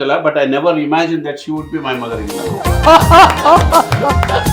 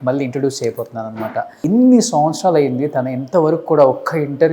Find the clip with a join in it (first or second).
second